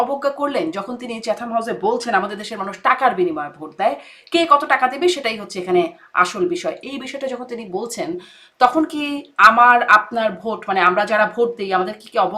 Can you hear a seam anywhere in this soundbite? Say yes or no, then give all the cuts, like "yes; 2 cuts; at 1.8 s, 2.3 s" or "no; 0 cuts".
no; 0 cuts